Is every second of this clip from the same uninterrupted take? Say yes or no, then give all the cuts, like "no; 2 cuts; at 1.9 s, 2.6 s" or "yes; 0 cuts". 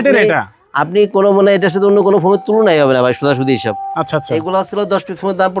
yes; 0 cuts